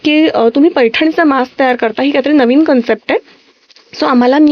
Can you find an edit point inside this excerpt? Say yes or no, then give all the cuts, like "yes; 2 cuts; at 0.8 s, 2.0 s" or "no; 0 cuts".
no; 0 cuts